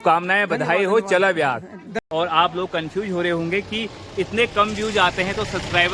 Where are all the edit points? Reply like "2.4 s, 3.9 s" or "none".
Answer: 2.1 s